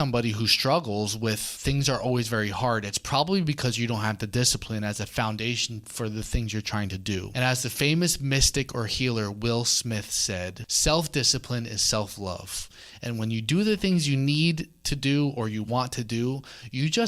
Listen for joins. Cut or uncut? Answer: cut